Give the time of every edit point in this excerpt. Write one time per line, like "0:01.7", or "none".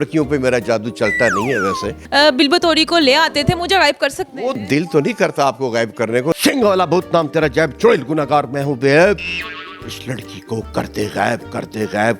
0:01.9
0:06.4